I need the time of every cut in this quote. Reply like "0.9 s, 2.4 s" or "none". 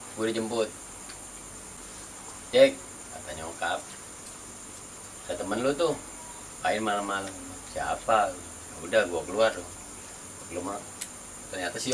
1.7 s